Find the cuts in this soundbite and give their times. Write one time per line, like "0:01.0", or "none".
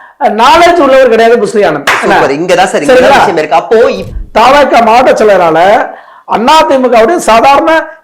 0:04.0